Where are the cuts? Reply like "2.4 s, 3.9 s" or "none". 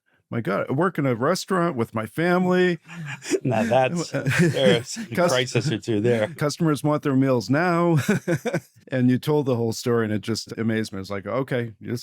6.3 s, 8.8 s, 10.5 s